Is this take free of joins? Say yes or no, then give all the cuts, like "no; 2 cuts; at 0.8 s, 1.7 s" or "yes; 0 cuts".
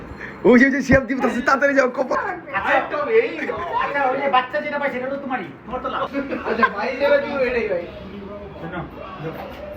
no; 2 cuts; at 2.1 s, 6.1 s